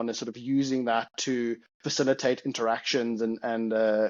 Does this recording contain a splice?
no; 0 cuts

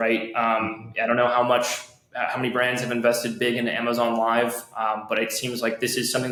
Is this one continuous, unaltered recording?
yes; 0 cuts

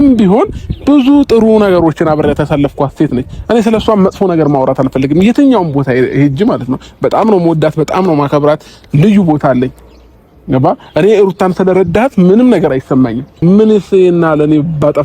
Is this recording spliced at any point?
yes; 1 cut; at 13.4 s

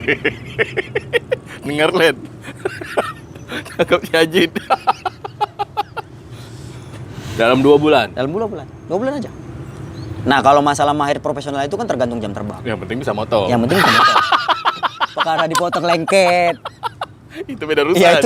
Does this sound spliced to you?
no; 0 cuts

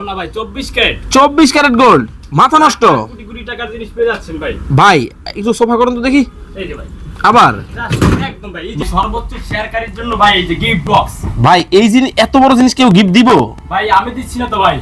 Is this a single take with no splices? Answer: no; 1 cut; at 8.9 s

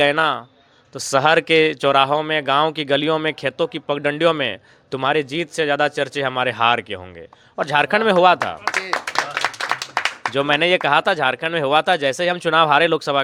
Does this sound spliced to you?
no; 0 cuts

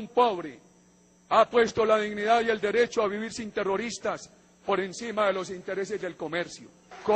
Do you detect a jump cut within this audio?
no; 0 cuts

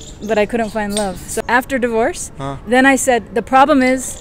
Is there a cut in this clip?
yes; 1 cut; at 1.4 s

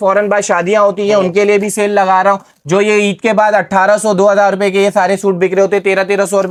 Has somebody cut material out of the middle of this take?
no; 0 cuts

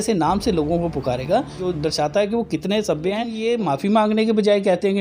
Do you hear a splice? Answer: yes; 2 cuts; at 1.6 s, 3.3 s

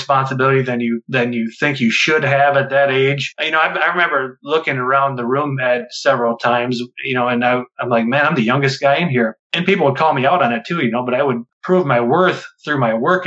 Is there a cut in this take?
yes; 1 cut; at 11.5 s

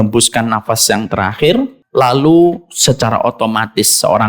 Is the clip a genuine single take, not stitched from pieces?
no; 1 cut; at 1.8 s

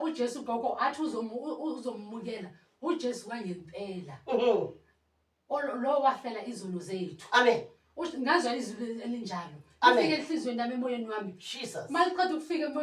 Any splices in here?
no; 0 cuts

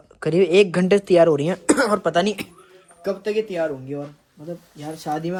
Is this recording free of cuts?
yes; 0 cuts

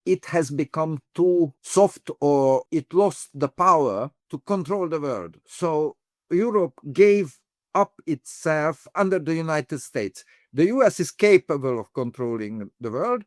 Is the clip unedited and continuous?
no; 5 cuts; at 1.6 s, 2.6 s, 4.3 s, 6.2 s, 8.9 s

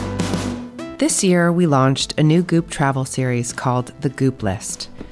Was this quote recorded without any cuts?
no; 1 cut; at 0.9 s

